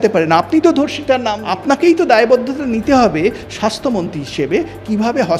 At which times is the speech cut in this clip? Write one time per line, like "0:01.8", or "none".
0:01.4